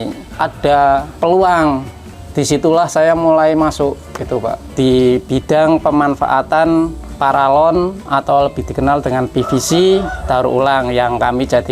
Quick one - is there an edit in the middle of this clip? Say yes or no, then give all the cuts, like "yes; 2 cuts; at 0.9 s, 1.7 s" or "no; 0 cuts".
yes; 2 cuts; at 1.1 s, 4.6 s